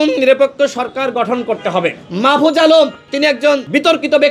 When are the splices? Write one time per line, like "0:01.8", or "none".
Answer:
0:02.0
0:03.4